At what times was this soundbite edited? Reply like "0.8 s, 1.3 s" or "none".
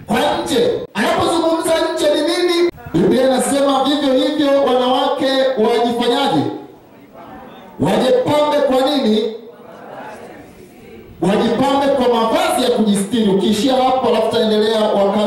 0.9 s, 2.7 s